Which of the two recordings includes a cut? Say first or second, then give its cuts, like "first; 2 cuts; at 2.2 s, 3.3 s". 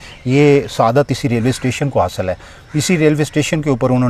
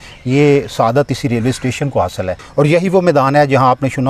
second; 1 cut; at 2.4 s